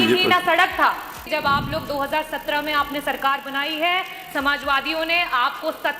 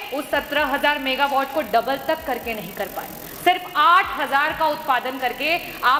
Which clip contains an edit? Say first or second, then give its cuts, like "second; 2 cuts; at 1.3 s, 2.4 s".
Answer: first; 1 cut; at 1.2 s